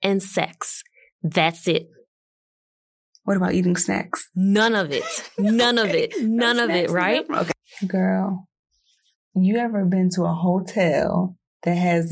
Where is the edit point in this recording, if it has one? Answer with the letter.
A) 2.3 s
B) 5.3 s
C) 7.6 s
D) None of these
C